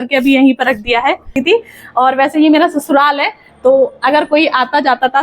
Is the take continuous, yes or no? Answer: no